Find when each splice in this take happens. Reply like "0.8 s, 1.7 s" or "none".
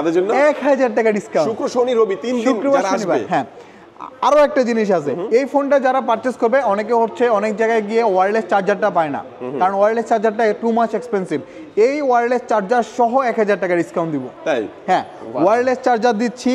none